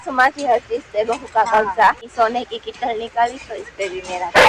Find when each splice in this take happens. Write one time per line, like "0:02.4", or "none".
0:02.1